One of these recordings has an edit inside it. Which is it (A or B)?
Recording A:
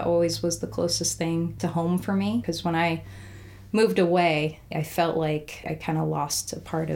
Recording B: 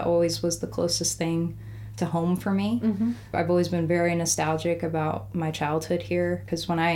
A